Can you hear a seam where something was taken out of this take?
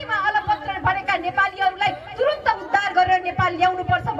no; 0 cuts

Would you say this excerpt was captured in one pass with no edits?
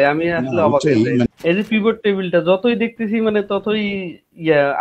no; 1 cut; at 1.2 s

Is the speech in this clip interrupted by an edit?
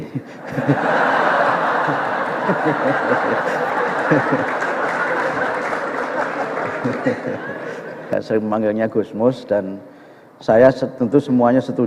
yes; 1 cut; at 8.1 s

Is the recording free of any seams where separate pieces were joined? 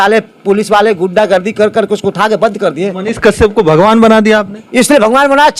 yes; 0 cuts

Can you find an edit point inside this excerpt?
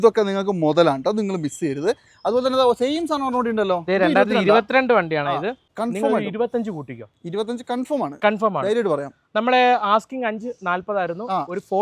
yes; 1 cut; at 5.6 s

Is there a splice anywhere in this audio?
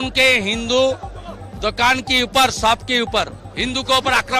yes; 1 cut; at 3.4 s

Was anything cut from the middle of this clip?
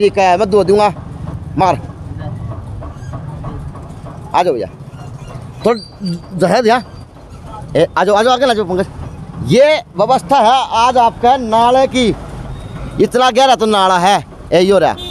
no; 0 cuts

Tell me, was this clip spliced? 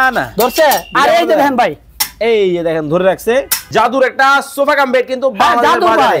yes; 1 cut; at 3.7 s

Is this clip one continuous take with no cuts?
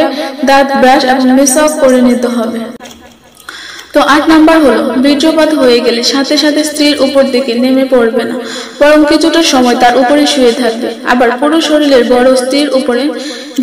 no; 1 cut; at 2.7 s

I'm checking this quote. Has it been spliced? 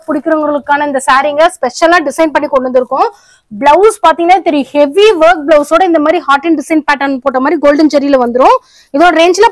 no; 0 cuts

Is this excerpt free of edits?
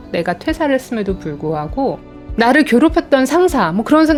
yes; 0 cuts

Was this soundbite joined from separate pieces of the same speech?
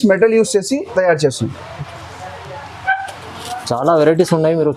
no; 0 cuts

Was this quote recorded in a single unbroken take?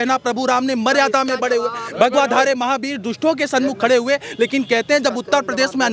yes; 0 cuts

